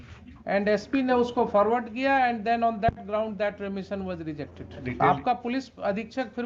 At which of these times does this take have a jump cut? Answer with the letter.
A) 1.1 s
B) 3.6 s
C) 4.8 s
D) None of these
C